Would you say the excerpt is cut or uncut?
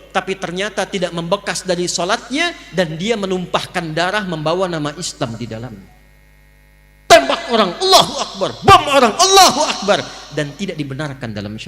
uncut